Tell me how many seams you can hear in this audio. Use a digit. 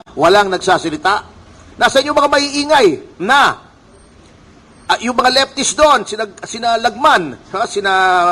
0